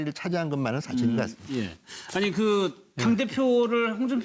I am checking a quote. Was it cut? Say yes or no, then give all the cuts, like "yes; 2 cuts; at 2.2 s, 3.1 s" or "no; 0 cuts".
no; 0 cuts